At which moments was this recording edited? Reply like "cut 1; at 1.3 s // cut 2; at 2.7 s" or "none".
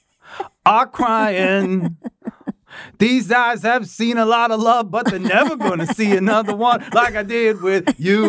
none

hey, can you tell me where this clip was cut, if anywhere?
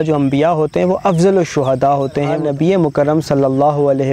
cut 1; at 2.4 s

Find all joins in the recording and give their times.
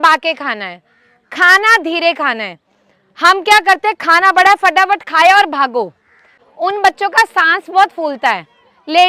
cut 1; at 6.4 s

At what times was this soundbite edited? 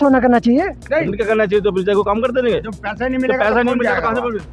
none

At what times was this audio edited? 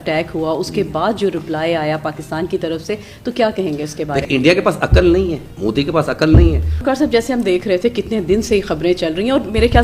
cut 1; at 4.2 s // cut 2; at 5.5 s // cut 3; at 6.7 s

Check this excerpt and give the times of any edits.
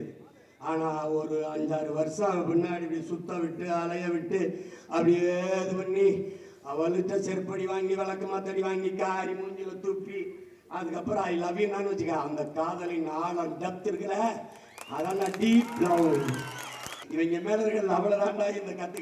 cut 1; at 17.0 s

